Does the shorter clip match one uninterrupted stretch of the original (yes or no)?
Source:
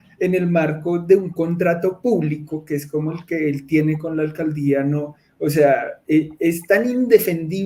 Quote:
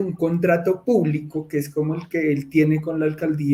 yes